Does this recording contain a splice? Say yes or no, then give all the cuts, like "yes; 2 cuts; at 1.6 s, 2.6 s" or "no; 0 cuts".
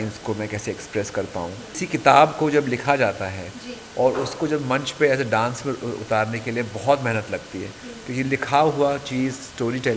yes; 1 cut; at 1.8 s